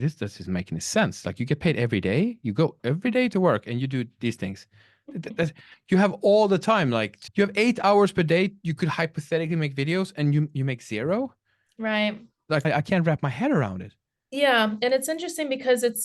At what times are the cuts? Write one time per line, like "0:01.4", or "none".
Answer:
0:07.2
0:12.7